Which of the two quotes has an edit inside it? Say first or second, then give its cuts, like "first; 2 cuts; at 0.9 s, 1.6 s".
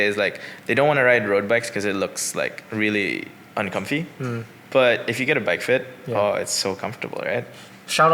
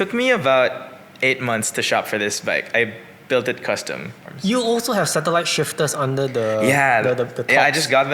second; 1 cut; at 4.2 s